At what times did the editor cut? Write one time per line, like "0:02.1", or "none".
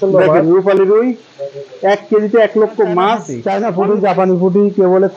0:03.3